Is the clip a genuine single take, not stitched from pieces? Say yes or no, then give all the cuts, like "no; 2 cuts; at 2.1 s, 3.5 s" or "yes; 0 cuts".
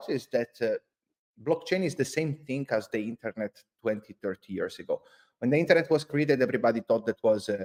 yes; 0 cuts